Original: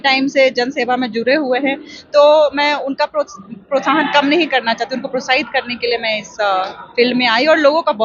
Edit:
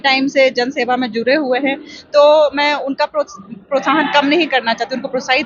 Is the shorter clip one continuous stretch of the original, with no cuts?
yes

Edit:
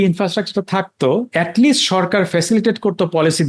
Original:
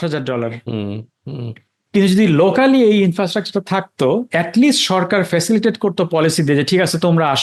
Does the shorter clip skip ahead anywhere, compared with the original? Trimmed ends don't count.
no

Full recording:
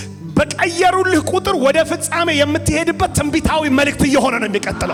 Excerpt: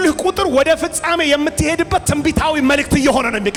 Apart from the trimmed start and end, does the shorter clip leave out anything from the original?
no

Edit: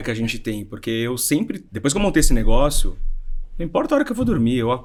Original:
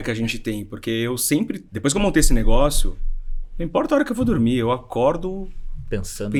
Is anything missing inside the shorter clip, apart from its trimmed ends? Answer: no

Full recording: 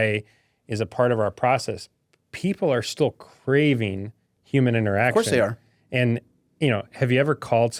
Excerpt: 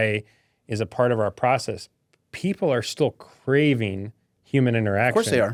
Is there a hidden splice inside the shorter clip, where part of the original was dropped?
no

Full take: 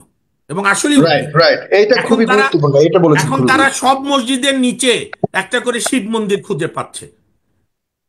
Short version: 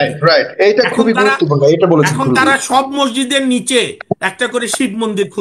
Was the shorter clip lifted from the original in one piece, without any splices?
yes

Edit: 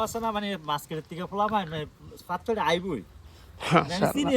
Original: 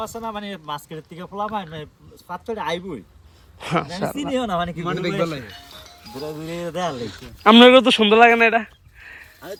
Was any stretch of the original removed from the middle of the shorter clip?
no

